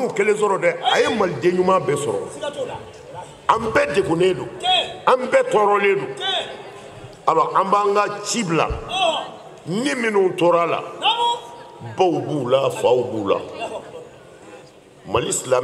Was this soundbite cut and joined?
no; 0 cuts

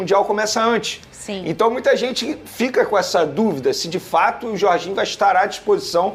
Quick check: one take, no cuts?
yes; 0 cuts

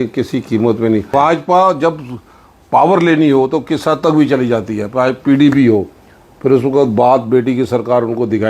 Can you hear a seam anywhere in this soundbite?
yes; 1 cut; at 1.1 s

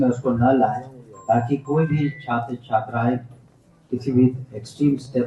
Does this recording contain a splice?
no; 0 cuts

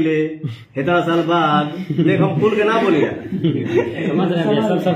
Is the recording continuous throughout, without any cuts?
yes; 0 cuts

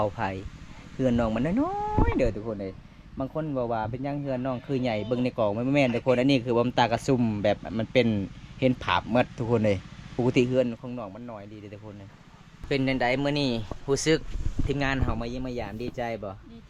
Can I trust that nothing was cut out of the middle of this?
no; 1 cut; at 12.6 s

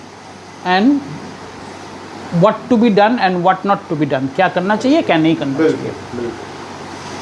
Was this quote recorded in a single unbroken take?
yes; 0 cuts

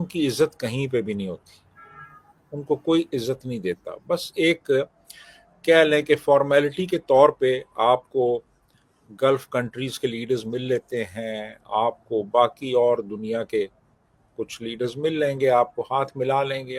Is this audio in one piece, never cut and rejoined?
yes; 0 cuts

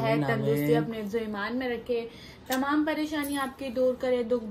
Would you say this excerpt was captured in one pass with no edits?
yes; 0 cuts

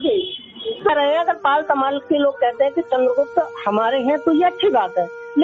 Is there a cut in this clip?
yes; 1 cut; at 0.9 s

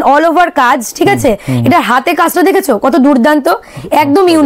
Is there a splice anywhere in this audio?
no; 0 cuts

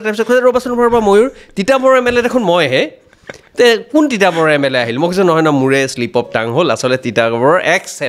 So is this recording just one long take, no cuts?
yes; 0 cuts

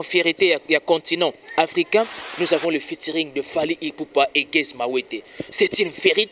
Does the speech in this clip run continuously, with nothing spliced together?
no; 1 cut; at 2.3 s

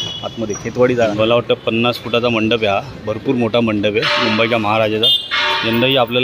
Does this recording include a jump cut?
yes; 1 cut; at 1.1 s

